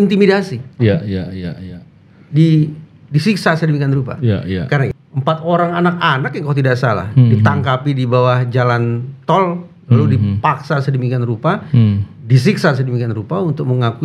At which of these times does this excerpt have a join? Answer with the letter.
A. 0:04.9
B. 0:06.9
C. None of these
A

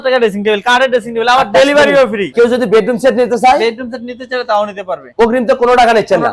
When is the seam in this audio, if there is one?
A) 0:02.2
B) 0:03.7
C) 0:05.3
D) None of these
A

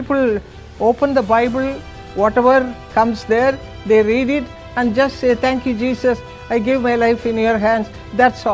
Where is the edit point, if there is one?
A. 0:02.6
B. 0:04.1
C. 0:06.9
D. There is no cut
D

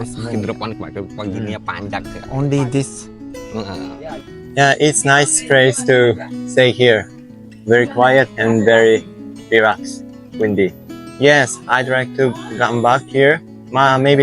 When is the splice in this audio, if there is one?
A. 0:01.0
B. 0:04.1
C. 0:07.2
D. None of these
B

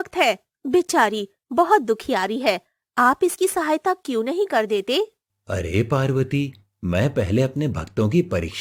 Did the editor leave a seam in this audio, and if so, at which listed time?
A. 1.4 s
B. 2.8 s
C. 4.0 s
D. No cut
D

